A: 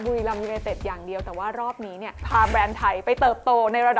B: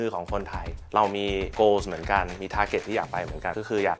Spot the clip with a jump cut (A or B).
A